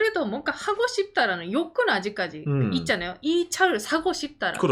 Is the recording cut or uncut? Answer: uncut